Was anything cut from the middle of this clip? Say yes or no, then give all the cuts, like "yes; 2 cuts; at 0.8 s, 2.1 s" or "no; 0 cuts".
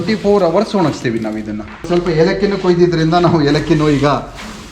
yes; 1 cut; at 1.9 s